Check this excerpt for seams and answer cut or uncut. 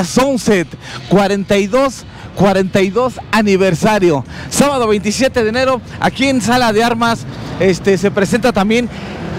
uncut